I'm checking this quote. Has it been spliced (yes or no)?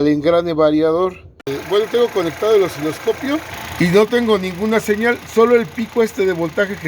yes